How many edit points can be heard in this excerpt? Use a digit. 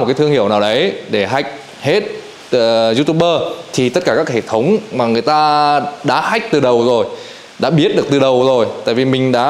0